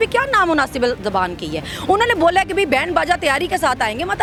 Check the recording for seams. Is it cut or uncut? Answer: uncut